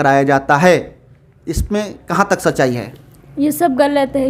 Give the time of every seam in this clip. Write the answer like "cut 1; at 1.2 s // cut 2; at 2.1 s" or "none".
none